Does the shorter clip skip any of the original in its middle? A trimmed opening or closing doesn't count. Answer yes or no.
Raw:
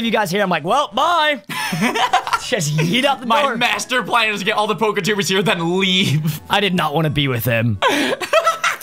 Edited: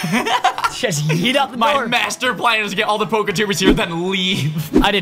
no